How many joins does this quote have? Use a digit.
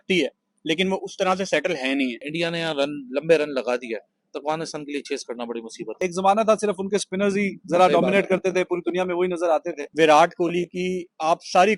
3